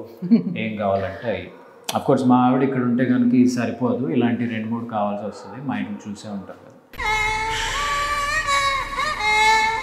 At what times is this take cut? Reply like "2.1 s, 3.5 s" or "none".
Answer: none